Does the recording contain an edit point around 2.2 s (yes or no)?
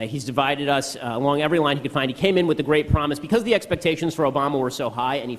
no